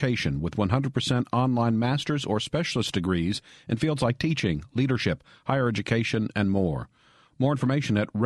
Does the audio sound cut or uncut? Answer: uncut